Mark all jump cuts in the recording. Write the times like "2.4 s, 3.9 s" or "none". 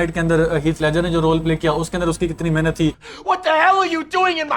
3.0 s